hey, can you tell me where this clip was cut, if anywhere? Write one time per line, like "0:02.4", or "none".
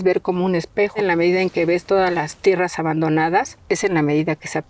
0:01.0
0:03.5